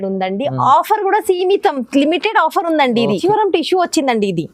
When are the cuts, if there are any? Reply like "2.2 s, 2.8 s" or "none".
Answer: 3.2 s